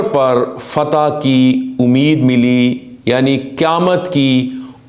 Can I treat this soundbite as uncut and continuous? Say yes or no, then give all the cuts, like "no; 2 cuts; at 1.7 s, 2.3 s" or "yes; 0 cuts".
yes; 0 cuts